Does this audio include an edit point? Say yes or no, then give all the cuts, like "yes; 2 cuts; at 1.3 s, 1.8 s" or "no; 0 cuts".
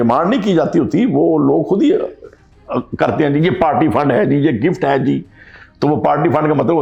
no; 0 cuts